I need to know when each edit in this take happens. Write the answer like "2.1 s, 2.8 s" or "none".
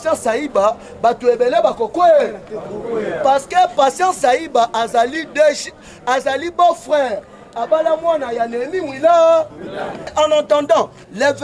10.1 s